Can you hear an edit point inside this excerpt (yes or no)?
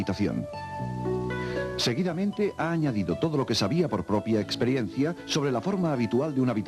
yes